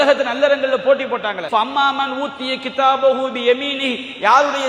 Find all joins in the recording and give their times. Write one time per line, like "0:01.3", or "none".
0:01.4